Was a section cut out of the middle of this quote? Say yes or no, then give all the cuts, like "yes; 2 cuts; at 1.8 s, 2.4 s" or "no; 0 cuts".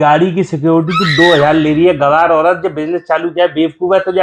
no; 0 cuts